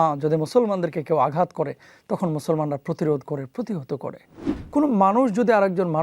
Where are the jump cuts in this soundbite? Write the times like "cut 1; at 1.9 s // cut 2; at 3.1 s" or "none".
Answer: cut 1; at 4.6 s